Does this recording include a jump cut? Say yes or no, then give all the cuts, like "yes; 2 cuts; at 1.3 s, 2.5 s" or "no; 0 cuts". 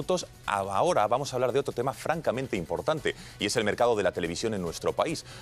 yes; 1 cut; at 3.5 s